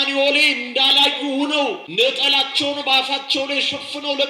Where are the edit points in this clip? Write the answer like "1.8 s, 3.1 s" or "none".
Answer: 1.8 s